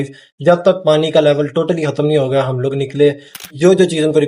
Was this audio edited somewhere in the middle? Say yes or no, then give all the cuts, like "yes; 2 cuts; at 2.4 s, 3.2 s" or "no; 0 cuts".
yes; 1 cut; at 3.3 s